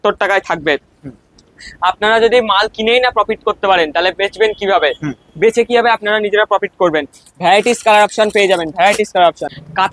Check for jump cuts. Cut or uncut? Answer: uncut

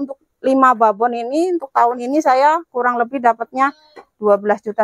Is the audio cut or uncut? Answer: uncut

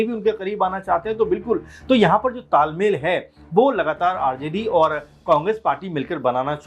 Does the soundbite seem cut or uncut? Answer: uncut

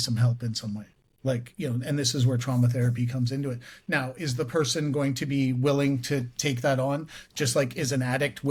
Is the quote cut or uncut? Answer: uncut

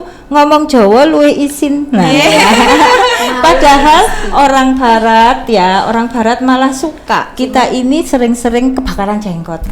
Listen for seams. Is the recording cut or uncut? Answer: cut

